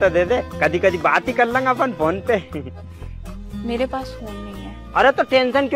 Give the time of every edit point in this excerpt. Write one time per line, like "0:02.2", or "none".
none